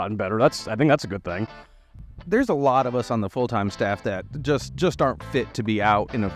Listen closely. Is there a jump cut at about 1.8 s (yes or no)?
yes